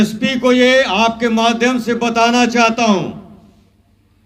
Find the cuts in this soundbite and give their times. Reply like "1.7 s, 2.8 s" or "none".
none

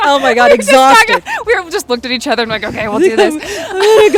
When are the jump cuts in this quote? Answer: none

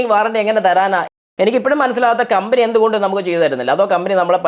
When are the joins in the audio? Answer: 1.1 s

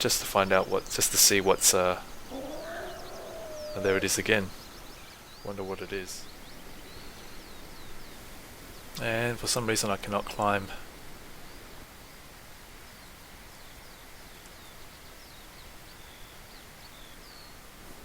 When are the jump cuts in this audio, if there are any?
6.1 s

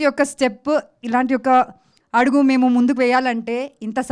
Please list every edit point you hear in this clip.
none

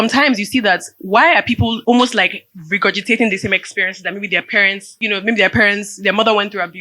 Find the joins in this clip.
1.8 s, 4.9 s

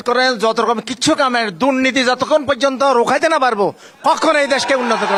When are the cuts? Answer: none

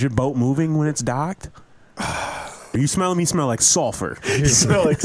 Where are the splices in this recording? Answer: 2.7 s

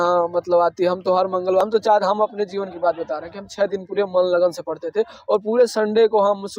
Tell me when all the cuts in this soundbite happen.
1.6 s

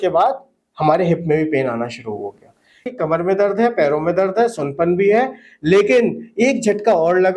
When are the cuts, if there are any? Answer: 2.8 s

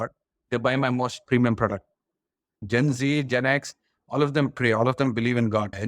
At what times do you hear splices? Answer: 2.5 s

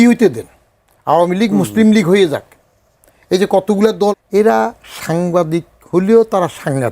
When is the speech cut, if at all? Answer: 4.1 s

